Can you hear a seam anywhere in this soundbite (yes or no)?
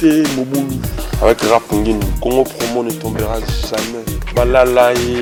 no